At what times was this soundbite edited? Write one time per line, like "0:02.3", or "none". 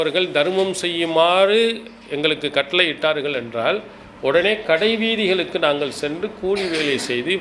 none

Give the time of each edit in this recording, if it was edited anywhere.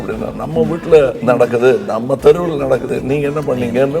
0:01.2
0:02.9

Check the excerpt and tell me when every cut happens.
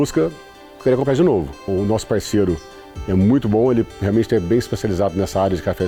none

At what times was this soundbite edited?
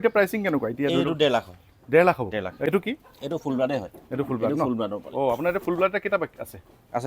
0:02.6

